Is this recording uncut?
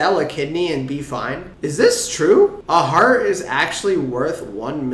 no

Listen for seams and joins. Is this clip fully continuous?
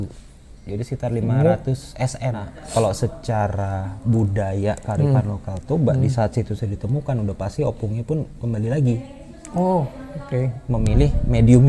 no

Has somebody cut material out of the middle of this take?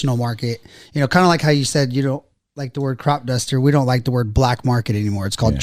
no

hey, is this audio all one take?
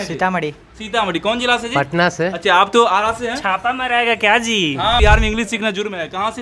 no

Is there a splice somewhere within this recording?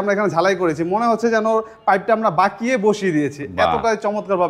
no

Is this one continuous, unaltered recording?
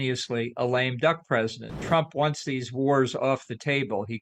no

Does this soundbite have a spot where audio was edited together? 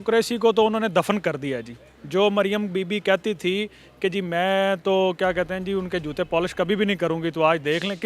no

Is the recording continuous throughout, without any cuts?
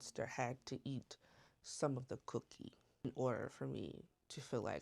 no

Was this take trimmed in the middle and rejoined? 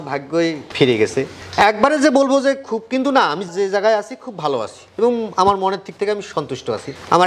no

